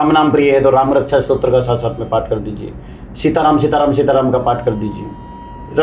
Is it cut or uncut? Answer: uncut